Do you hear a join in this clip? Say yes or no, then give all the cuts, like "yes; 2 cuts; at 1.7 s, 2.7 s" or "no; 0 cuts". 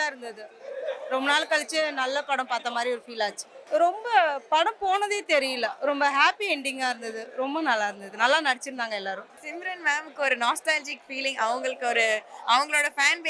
no; 0 cuts